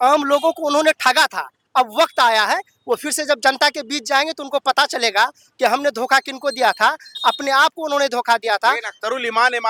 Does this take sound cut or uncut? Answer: uncut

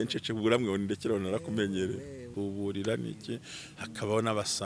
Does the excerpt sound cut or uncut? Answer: cut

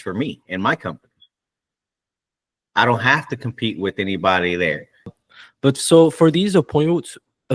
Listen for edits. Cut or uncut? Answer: uncut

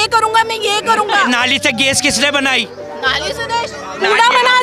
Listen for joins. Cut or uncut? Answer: cut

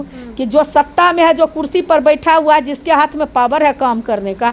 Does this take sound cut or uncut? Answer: uncut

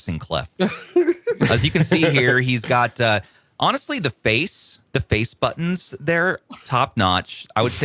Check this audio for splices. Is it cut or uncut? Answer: uncut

